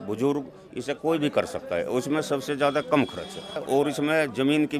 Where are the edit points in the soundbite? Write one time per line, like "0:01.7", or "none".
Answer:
0:03.6